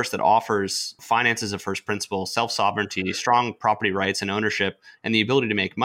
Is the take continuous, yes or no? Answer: no